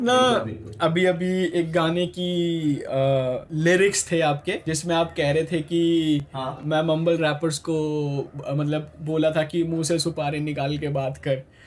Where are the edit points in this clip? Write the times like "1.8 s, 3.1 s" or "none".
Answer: 3.5 s, 4.7 s